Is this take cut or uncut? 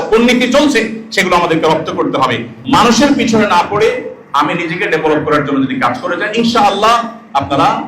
cut